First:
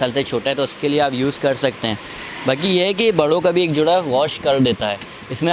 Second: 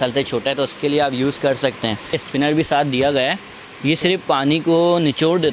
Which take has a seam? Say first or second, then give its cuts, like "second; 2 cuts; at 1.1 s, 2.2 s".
second; 1 cut; at 2.2 s